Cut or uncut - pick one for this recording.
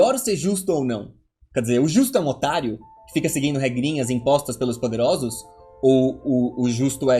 uncut